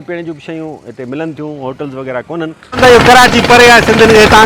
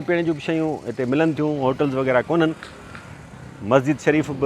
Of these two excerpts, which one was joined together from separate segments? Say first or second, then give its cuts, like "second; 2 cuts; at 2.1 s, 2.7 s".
first; 1 cut; at 2.8 s